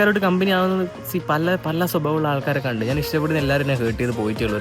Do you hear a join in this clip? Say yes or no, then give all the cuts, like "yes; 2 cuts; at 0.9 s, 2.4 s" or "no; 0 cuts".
no; 0 cuts